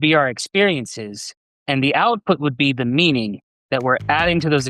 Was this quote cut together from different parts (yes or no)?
no